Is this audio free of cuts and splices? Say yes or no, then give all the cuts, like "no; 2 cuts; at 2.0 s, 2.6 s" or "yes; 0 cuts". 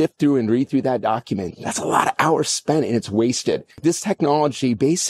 no; 1 cut; at 3.7 s